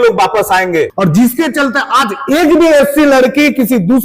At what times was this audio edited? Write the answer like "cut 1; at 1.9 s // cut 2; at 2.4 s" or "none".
cut 1; at 0.9 s